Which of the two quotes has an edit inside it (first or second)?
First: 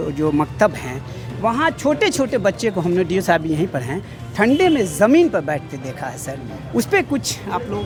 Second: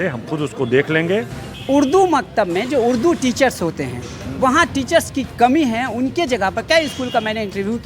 second